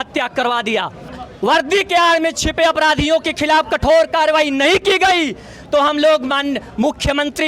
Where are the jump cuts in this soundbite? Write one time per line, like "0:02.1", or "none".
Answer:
0:01.1